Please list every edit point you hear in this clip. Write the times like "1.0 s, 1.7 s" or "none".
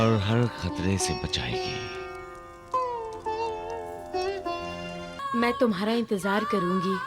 5.2 s